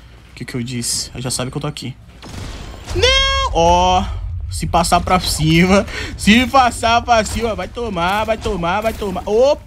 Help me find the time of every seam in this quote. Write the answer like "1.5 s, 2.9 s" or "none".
none